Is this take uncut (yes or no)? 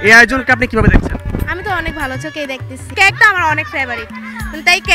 no